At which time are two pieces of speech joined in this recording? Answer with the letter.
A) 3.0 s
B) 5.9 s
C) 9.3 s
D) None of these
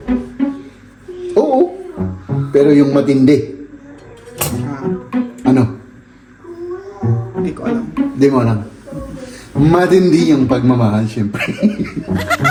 D